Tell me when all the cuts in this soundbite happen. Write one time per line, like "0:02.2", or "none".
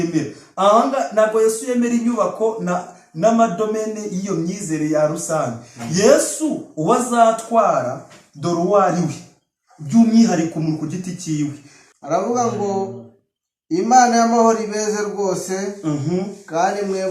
none